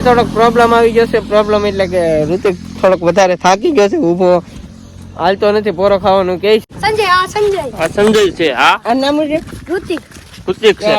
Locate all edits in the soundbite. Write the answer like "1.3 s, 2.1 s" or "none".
6.6 s

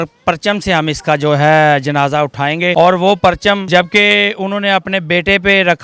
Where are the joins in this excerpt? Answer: 2.7 s, 3.6 s

